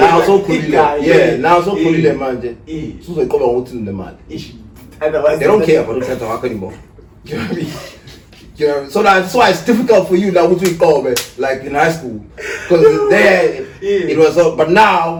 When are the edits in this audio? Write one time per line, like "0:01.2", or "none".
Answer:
none